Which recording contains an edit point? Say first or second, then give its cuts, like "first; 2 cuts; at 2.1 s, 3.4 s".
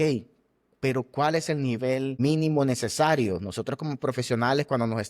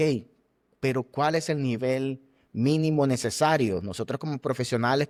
first; 1 cut; at 2.1 s